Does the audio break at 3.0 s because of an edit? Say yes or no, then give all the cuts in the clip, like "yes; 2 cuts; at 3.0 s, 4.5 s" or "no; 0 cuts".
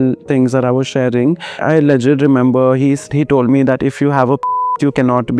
no; 1 cut; at 1.6 s